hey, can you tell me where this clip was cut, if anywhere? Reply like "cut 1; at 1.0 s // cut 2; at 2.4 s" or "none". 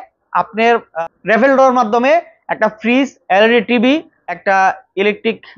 cut 1; at 0.9 s // cut 2; at 4.5 s